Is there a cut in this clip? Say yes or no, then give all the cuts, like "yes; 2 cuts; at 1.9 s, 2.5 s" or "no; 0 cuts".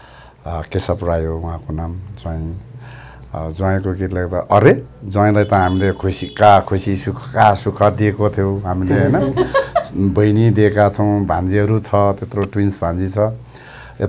no; 0 cuts